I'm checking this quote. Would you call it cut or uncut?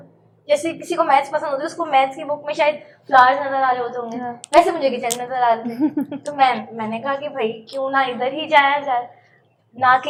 uncut